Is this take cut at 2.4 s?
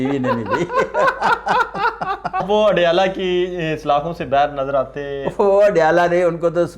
yes; 1 cut; at 2.4 s

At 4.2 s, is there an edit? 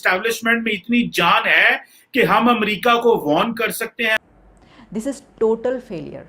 yes; 1 cut; at 4.2 s

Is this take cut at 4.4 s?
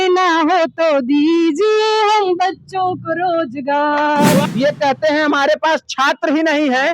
yes; 1 cut; at 4.4 s

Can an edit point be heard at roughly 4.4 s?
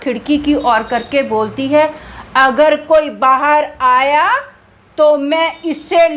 no; 0 cuts

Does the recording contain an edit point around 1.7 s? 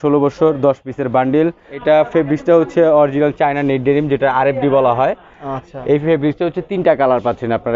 yes; 1 cut; at 1.7 s

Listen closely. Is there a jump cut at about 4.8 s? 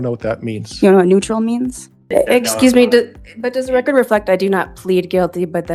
no; 1 cut; at 2.0 s

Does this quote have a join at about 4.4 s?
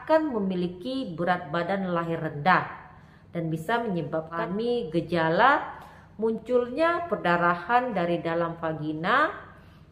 yes; 1 cut; at 4.4 s

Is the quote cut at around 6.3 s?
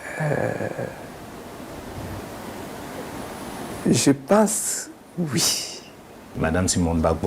yes; 1 cut; at 6.3 s

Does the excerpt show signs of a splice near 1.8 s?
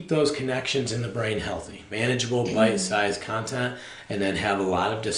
yes; 1 cut; at 1.8 s

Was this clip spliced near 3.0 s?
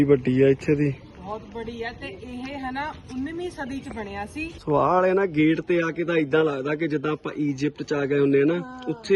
no; 2 cuts; at 1.1 s, 4.6 s

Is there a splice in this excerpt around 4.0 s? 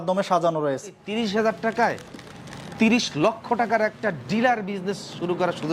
no; 1 cut; at 1.0 s

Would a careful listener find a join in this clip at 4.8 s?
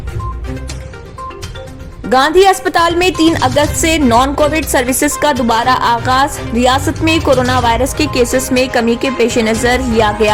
no; 0 cuts

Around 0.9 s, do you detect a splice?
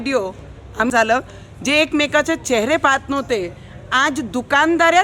yes; 1 cut; at 0.9 s

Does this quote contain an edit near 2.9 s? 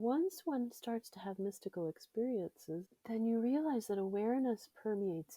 yes; 1 cut; at 2.9 s

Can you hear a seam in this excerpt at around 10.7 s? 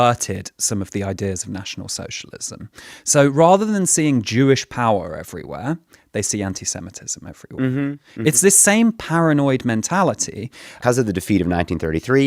yes; 1 cut; at 10.7 s

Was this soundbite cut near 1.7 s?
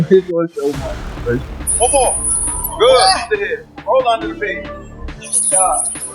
yes; 1 cut; at 1.7 s

